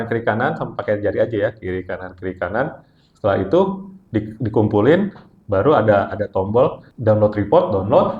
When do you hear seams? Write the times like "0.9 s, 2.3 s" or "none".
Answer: 6.9 s